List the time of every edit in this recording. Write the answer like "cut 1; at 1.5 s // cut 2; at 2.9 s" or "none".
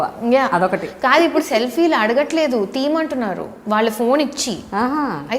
none